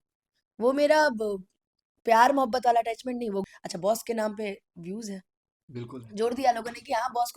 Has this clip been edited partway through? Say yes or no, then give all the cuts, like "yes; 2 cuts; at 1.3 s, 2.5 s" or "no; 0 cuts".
yes; 1 cut; at 3.5 s